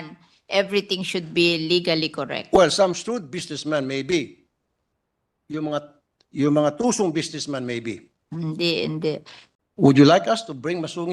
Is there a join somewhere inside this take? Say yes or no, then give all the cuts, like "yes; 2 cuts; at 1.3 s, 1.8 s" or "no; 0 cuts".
yes; 1 cut; at 9.4 s